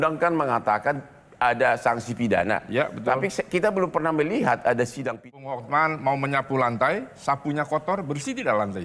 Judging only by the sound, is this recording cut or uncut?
cut